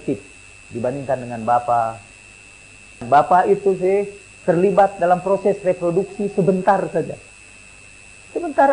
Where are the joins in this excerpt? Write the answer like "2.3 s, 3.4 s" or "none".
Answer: 3.0 s